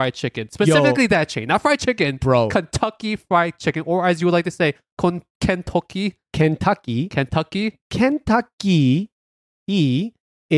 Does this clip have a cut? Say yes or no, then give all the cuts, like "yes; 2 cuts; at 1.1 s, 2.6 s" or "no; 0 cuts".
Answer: no; 0 cuts